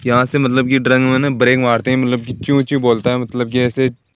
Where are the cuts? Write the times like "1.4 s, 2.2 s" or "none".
none